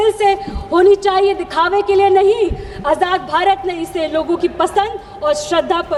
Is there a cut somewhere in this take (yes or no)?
no